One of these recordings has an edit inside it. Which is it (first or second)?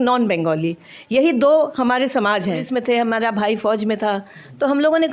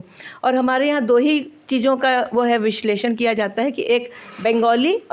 first